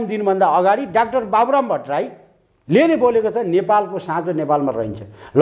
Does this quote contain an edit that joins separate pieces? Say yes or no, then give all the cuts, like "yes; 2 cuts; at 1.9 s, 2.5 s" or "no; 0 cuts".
no; 0 cuts